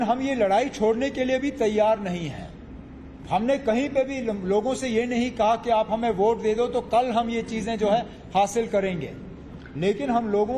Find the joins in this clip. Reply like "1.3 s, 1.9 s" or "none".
8.2 s